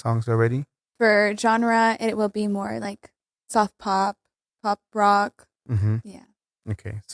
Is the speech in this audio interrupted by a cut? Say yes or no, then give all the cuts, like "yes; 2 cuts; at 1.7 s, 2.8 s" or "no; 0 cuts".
yes; 1 cut; at 0.9 s